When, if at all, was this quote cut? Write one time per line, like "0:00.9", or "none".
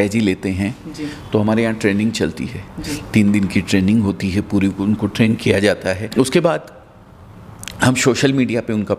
0:06.1